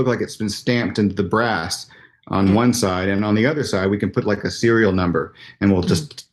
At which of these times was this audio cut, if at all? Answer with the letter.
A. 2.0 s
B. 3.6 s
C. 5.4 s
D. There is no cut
D